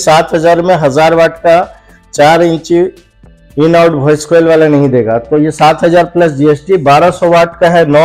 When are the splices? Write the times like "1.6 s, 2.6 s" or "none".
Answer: none